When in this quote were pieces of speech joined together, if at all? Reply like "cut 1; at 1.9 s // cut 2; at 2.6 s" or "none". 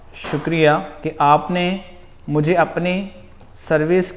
cut 1; at 1.0 s